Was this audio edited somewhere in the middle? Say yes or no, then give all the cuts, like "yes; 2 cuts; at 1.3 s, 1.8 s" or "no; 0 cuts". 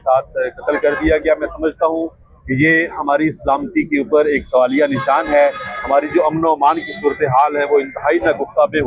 no; 0 cuts